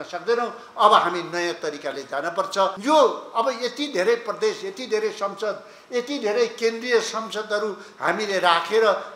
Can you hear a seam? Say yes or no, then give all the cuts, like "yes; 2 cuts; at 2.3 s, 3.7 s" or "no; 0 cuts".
yes; 1 cut; at 2.8 s